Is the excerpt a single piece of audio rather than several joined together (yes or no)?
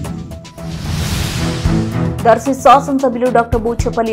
no